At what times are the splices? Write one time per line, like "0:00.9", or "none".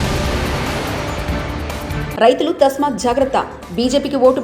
0:02.1

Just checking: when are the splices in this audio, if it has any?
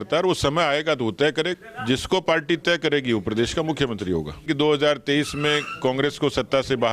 0:01.5
0:04.4

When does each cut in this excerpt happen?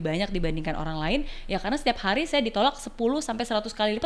none

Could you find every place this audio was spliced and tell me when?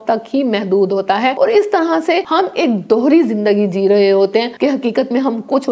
0:01.3
0:02.3
0:04.5

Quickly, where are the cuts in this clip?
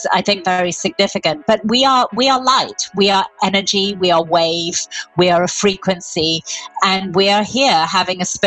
0:06.7

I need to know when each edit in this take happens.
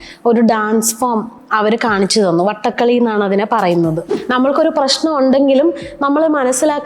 0:04.1

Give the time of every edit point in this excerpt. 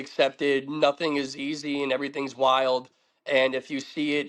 none

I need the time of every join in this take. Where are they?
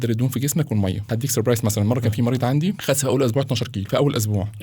0:01.1
0:02.8
0:03.8

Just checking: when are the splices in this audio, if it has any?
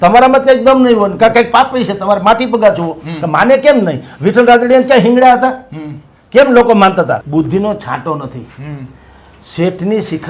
0:07.2

